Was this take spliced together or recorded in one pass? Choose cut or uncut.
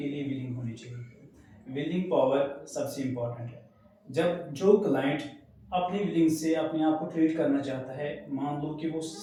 uncut